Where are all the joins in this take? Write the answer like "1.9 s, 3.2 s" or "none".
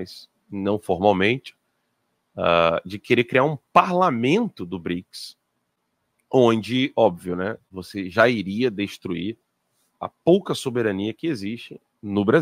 none